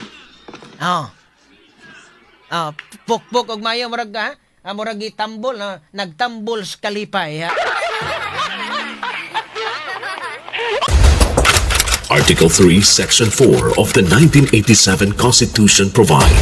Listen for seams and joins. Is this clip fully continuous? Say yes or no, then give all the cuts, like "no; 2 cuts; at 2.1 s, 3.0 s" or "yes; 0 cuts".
no; 1 cut; at 10.9 s